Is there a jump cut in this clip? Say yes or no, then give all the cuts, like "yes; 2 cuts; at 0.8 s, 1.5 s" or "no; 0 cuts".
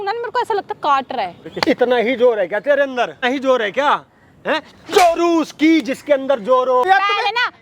yes; 3 cuts; at 1.5 s, 3.2 s, 6.8 s